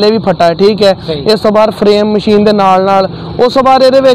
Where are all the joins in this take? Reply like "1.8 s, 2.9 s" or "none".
none

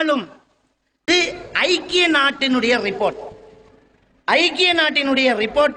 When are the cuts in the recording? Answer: 1.1 s

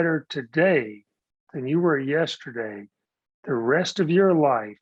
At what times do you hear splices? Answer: none

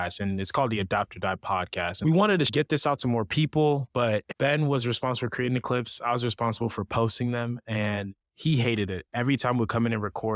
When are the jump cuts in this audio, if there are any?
1.9 s, 2.5 s, 4.3 s

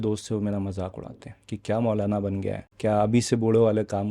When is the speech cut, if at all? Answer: 2.6 s

